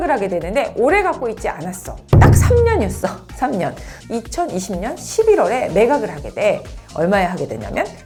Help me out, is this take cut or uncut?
uncut